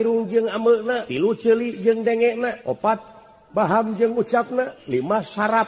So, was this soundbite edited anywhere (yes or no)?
yes